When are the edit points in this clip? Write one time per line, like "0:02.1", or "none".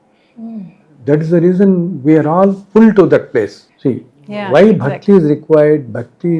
0:03.6